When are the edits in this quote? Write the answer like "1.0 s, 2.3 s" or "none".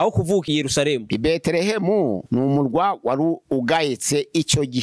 none